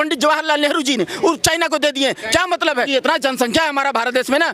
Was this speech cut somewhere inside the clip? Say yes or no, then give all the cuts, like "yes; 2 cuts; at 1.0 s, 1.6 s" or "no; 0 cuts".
yes; 1 cut; at 2.9 s